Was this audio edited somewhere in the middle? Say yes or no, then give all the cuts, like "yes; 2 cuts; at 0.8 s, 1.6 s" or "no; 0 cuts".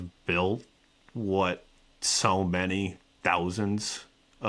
no; 0 cuts